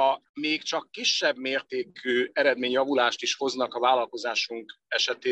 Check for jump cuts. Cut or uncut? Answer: uncut